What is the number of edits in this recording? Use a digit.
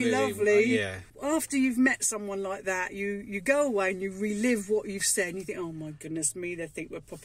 1